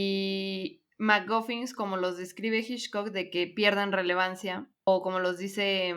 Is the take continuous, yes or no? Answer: no